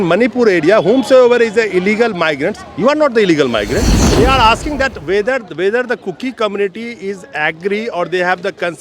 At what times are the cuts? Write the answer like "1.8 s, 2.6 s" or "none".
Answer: 4.1 s

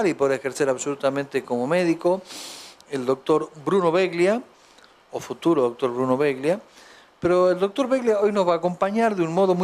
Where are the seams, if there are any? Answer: 7.1 s

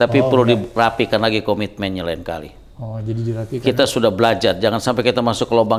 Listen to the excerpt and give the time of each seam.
none

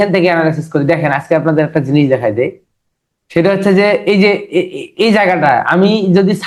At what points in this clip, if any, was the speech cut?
none

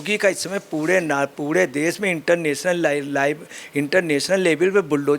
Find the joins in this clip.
none

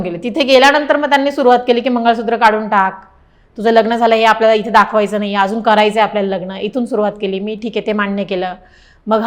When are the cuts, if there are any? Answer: none

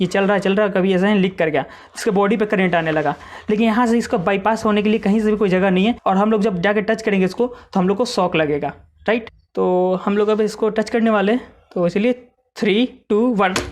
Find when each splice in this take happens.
6.0 s, 9.4 s

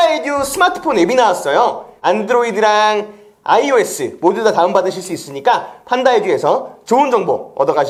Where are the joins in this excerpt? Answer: none

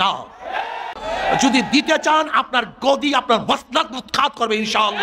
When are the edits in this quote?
1.0 s

